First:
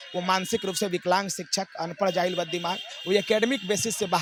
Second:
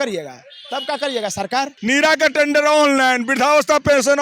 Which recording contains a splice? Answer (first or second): second